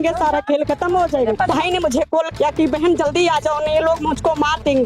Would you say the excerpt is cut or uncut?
cut